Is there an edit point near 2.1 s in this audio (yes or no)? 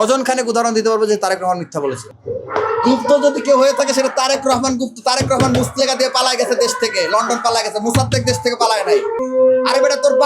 yes